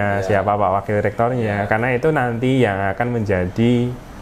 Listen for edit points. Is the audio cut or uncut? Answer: uncut